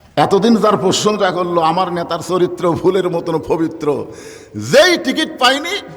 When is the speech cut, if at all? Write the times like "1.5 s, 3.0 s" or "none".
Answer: none